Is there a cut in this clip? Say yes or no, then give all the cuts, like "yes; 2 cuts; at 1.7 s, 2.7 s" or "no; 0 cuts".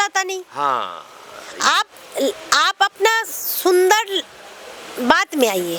no; 0 cuts